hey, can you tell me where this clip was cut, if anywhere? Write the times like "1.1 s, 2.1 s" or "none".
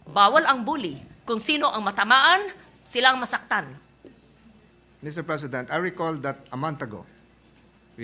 none

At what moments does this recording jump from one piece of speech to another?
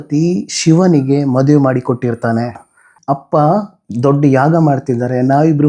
2.9 s

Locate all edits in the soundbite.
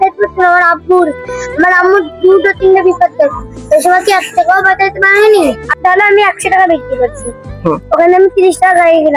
5.6 s

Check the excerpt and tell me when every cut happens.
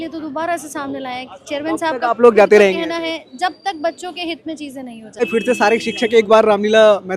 5.2 s

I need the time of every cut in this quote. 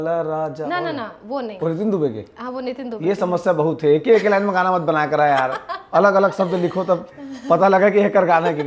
none

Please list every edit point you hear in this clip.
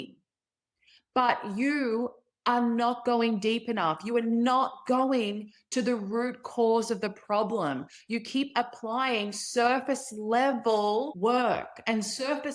11.1 s

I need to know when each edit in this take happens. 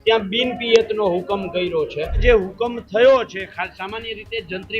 2.2 s

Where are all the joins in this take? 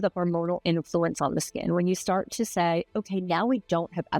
none

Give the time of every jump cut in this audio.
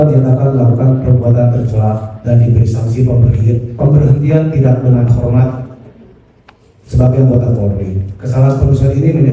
none

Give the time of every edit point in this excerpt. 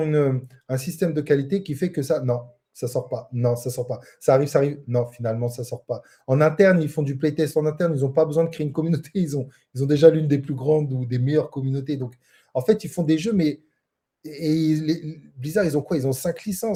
none

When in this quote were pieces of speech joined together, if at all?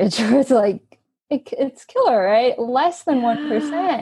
none

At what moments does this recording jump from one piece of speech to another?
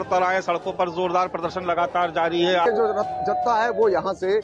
2.7 s

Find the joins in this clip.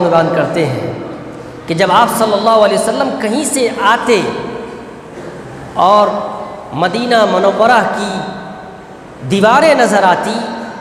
none

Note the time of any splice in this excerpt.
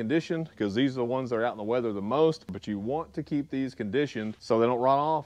2.6 s, 4.4 s

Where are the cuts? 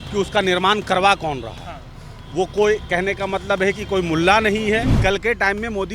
4.9 s

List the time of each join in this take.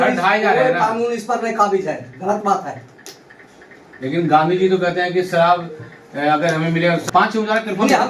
7.0 s

